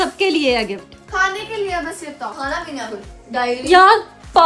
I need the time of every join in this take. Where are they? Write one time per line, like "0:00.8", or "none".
none